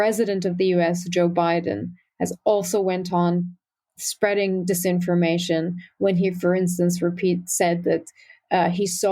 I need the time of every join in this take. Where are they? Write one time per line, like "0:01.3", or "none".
none